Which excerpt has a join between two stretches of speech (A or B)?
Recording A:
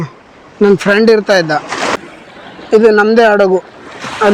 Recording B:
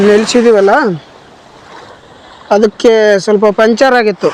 A